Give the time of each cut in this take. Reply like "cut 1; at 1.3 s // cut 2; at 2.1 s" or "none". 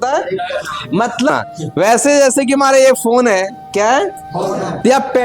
cut 1; at 1.3 s